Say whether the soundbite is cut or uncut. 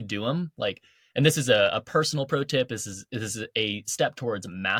uncut